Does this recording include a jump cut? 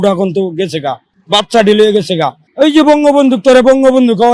yes; 2 cuts; at 1.1 s, 2.4 s

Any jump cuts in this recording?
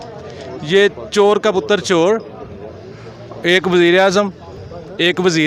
no; 0 cuts

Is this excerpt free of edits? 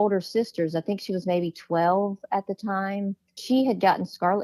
no; 1 cut; at 3.4 s

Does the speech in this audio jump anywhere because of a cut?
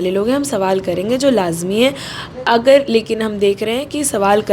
no; 0 cuts

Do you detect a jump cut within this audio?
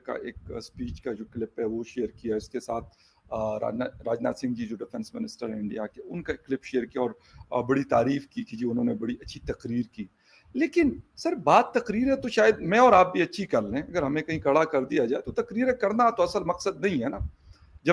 no; 0 cuts

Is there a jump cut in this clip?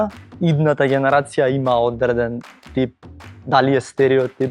no; 0 cuts

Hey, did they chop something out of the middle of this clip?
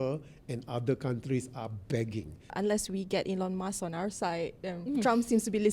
yes; 1 cut; at 2.5 s

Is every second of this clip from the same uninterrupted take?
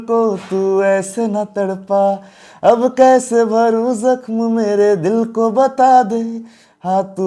yes; 0 cuts

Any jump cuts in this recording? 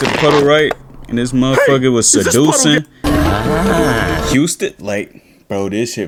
no; 0 cuts

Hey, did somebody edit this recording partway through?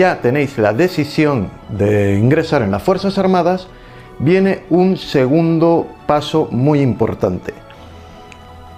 no; 0 cuts

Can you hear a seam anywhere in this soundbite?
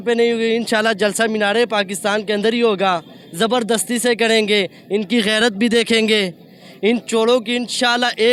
no; 0 cuts

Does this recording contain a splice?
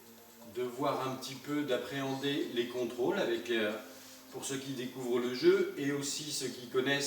yes; 1 cut; at 1.4 s

